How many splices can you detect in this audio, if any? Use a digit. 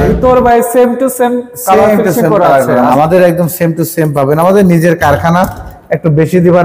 1